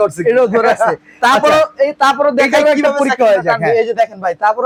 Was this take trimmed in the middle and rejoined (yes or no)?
no